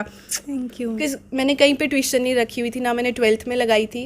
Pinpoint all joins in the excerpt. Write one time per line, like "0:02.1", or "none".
0:01.0